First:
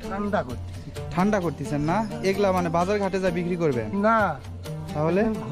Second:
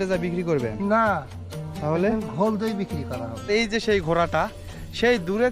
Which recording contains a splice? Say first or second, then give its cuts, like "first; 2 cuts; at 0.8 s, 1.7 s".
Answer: second; 1 cut; at 3.5 s